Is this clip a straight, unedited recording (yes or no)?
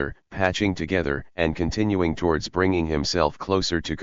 yes